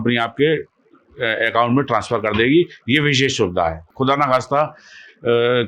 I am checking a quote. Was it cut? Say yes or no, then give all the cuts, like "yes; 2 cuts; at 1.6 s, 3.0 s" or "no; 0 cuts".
yes; 1 cut; at 3.9 s